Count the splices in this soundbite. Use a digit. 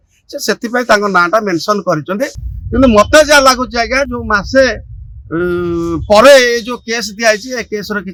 0